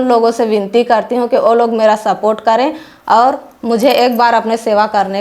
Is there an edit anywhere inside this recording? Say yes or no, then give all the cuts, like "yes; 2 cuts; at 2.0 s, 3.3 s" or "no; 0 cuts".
no; 0 cuts